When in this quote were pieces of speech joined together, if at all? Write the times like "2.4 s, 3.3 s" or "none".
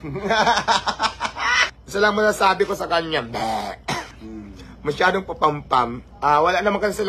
1.7 s, 4.1 s

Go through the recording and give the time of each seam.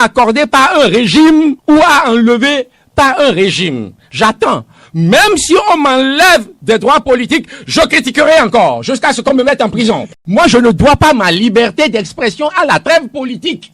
10.1 s

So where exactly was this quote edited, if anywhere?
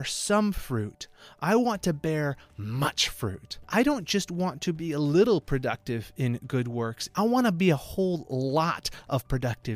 3.5 s, 7.0 s

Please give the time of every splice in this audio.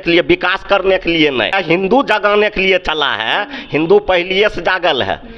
1.6 s

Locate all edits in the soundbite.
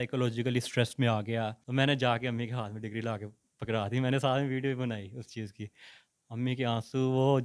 1.6 s

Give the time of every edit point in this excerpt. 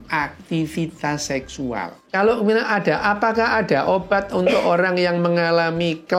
2.0 s

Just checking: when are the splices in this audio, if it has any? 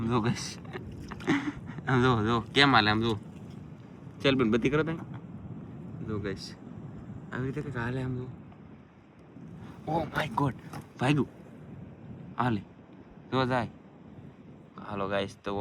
none

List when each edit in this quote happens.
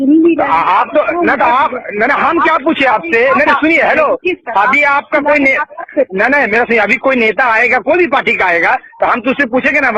none

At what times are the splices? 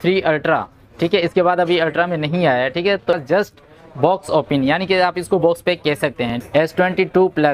3.0 s, 6.4 s

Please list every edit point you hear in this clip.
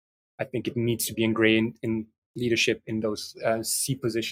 none

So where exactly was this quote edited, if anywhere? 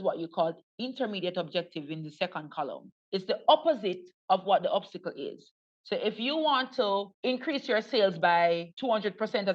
2.9 s, 7.1 s, 8.7 s

